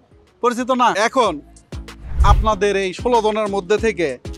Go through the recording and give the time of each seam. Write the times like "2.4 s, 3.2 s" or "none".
0.9 s